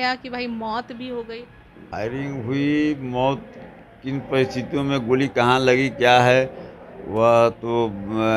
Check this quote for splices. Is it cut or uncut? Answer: cut